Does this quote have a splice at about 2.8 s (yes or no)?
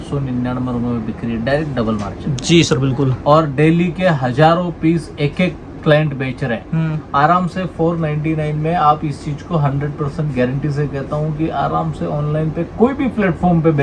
no